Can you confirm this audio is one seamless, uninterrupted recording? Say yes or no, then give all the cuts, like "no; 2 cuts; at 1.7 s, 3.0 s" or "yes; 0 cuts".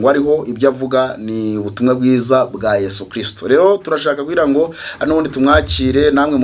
yes; 0 cuts